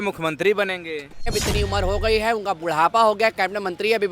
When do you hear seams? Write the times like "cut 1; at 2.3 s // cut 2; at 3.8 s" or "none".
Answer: cut 1; at 1.3 s